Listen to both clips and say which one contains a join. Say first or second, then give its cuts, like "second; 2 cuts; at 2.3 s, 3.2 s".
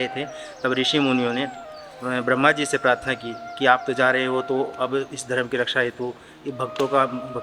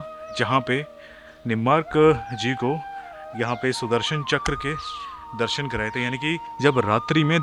second; 1 cut; at 6.5 s